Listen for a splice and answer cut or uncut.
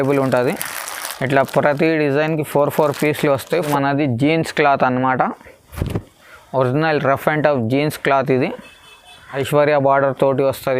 cut